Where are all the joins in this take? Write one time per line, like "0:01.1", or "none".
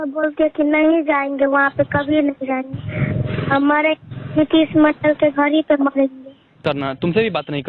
0:06.6